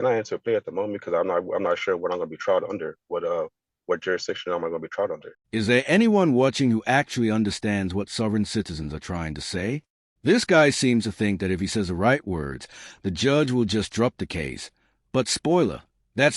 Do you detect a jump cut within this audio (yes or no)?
yes